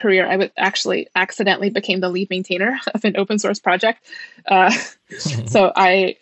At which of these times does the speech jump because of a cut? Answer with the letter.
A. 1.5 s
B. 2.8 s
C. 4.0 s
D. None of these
D